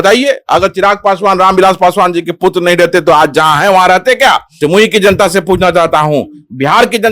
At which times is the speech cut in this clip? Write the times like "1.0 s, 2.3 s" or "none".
4.5 s